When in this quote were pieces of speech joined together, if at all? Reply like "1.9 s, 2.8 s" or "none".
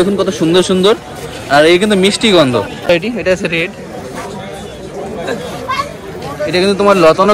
2.9 s